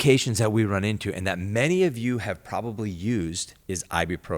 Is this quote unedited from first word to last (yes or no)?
no